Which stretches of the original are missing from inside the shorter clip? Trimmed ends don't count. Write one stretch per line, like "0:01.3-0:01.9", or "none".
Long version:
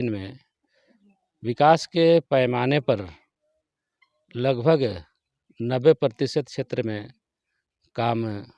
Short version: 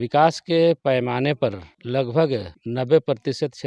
0:03.2-0:04.2
0:05.1-0:05.5